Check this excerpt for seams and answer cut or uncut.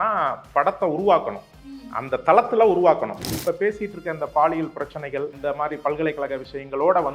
cut